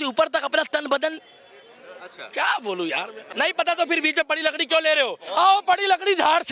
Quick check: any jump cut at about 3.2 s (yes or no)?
yes